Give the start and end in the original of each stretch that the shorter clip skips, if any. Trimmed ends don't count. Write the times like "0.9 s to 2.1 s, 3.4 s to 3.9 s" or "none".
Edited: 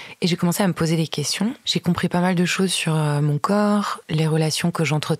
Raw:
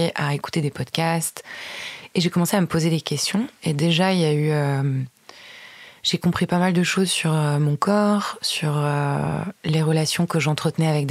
3.5 s to 6.0 s, 8.4 s to 9.6 s